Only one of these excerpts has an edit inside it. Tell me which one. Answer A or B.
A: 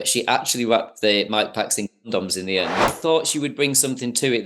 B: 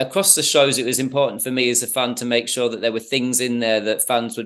A